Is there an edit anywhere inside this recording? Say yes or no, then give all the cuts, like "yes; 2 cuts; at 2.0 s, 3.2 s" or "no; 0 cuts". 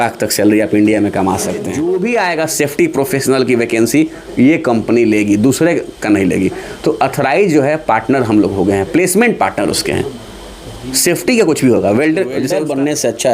yes; 2 cuts; at 1.7 s, 12.5 s